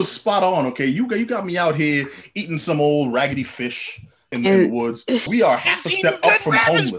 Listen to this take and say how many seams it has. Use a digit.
2